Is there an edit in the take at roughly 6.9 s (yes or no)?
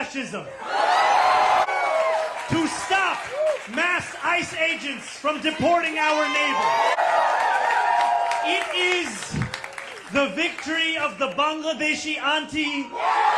yes